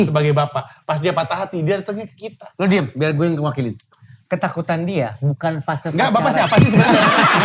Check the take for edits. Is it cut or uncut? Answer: uncut